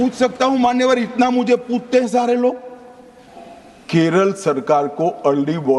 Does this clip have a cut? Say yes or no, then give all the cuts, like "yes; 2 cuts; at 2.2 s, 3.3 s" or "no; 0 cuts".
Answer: yes; 1 cut; at 3.3 s